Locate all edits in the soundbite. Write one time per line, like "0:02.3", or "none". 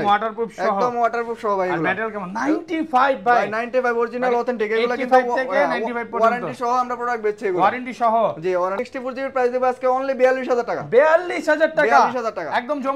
0:08.7